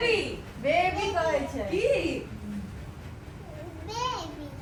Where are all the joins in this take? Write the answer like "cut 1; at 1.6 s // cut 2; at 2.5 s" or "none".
none